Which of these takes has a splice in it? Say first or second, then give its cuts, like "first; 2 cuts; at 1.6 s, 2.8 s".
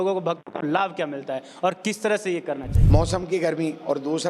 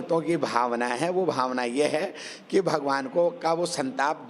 first; 1 cut; at 2.7 s